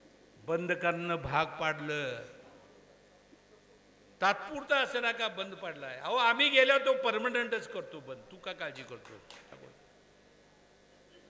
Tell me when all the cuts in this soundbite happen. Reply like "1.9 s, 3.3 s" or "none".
9.5 s